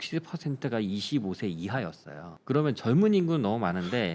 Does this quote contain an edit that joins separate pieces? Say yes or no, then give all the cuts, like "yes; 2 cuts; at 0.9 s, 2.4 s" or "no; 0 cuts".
no; 0 cuts